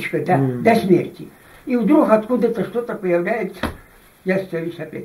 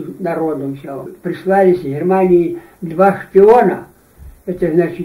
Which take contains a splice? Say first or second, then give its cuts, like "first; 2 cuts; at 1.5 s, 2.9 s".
second; 1 cut; at 1.1 s